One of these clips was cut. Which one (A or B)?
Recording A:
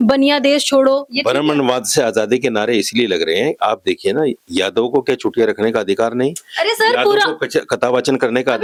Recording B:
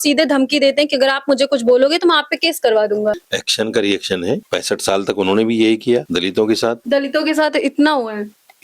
B